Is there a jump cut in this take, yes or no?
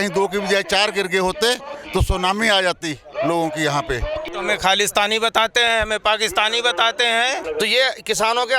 yes